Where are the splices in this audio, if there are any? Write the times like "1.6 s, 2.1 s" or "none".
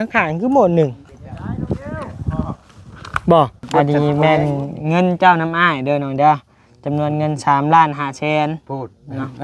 3.6 s